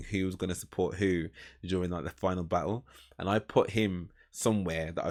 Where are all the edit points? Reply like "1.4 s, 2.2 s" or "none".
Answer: none

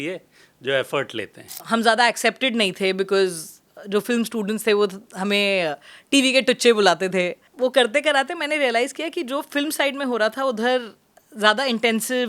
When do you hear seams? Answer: 1.6 s, 7.4 s

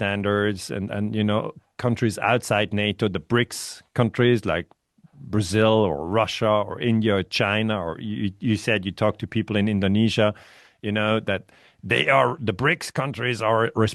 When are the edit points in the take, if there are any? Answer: none

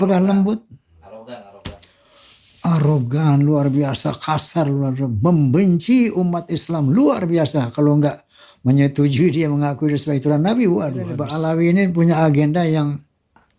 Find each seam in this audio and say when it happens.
11.3 s

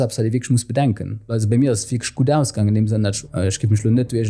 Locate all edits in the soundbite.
1.3 s, 3.2 s

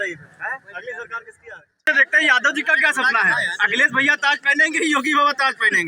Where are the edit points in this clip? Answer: 1.8 s

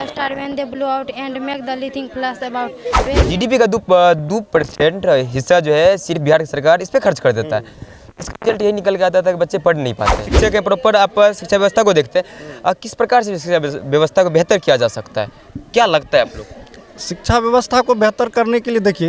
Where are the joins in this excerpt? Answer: 3.1 s, 10.3 s

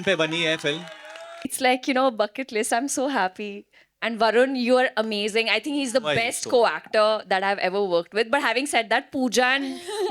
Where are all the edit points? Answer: 1.5 s

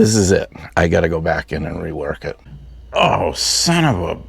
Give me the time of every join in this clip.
2.3 s

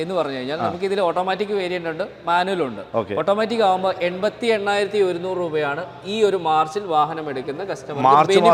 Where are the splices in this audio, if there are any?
none

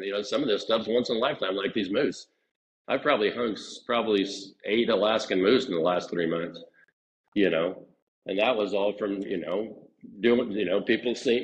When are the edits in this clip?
none

